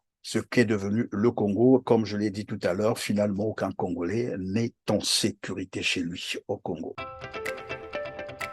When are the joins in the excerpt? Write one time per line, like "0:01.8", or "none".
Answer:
0:07.0